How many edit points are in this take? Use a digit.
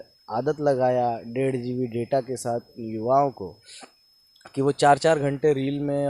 0